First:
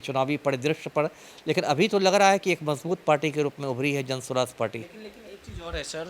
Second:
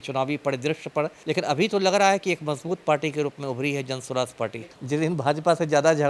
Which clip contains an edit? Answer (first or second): second